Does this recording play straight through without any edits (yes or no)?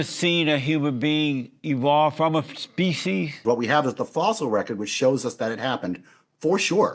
no